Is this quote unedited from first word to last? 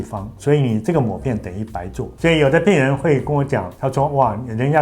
no; 1 cut; at 2.1 s

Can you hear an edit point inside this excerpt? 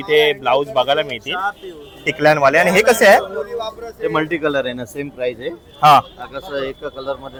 no; 0 cuts

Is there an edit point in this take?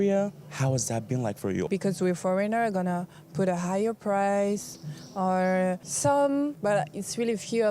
yes; 3 cuts; at 1.7 s, 5.9 s, 6.6 s

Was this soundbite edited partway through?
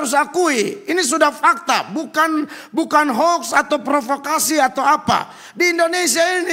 no; 0 cuts

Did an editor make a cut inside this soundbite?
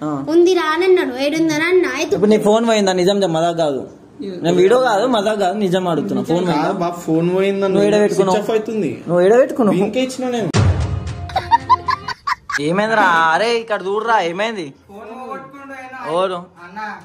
yes; 1 cut; at 12.5 s

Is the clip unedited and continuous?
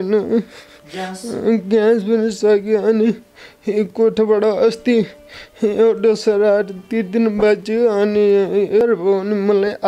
no; 1 cut; at 8.8 s

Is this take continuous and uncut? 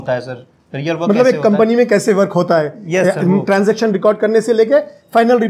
yes; 0 cuts

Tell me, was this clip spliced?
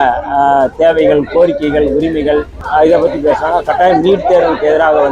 yes; 1 cut; at 2.6 s

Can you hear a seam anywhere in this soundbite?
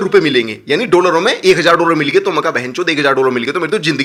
no; 0 cuts

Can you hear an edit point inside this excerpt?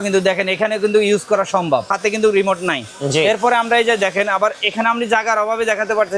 yes; 1 cut; at 1.9 s

